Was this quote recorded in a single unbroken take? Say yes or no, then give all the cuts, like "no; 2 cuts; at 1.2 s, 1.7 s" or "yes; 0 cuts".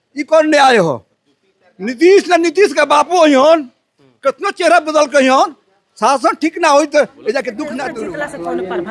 no; 1 cut; at 7.8 s